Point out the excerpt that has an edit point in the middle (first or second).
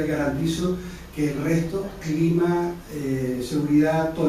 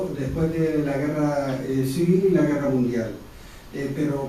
first